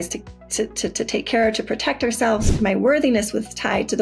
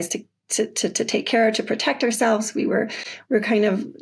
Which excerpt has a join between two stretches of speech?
first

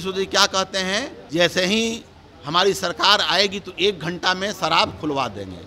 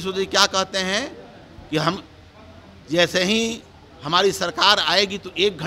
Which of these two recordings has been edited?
first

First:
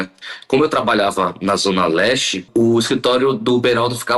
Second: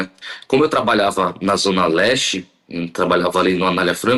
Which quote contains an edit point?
first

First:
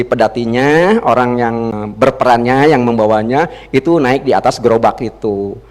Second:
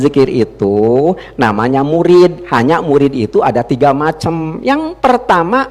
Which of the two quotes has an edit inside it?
first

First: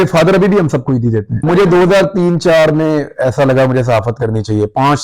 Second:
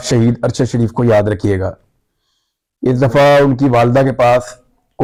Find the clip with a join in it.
first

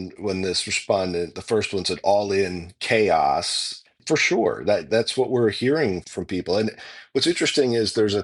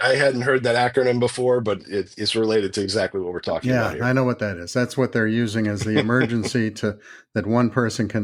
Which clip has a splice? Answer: first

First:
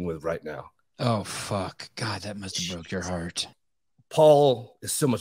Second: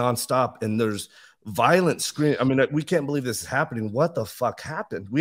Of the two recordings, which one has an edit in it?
first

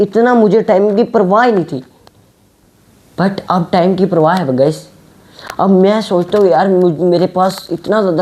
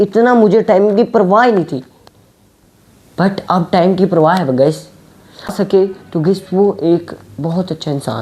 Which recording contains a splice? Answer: second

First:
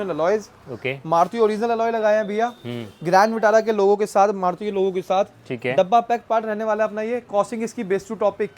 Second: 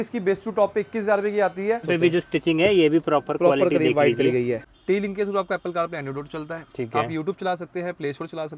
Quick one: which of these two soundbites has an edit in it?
second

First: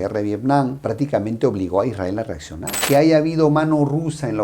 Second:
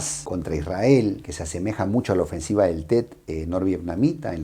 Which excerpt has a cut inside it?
first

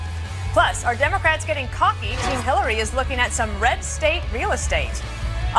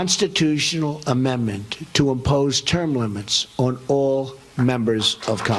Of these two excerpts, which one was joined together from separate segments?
second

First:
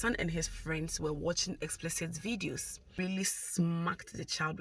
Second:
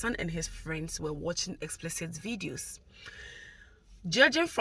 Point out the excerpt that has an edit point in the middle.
first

